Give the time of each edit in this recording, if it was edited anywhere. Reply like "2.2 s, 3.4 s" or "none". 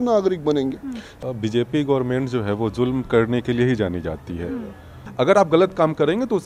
1.1 s, 5.0 s